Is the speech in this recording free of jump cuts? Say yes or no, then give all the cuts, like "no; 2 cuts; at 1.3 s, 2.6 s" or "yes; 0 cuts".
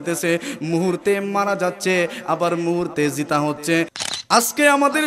no; 1 cut; at 4.0 s